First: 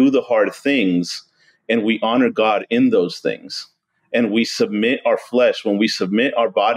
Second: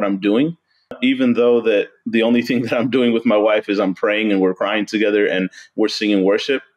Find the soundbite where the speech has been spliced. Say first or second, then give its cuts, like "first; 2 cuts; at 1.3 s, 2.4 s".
second; 1 cut; at 1.0 s